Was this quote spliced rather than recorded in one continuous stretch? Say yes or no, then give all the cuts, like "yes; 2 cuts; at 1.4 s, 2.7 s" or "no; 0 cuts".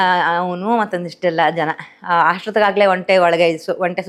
no; 0 cuts